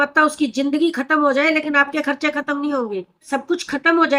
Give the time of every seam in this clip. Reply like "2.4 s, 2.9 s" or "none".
3.2 s